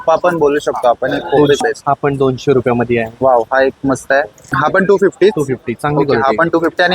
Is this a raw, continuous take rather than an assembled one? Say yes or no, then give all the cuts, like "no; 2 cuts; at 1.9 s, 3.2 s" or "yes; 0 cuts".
no; 2 cuts; at 1.6 s, 4.4 s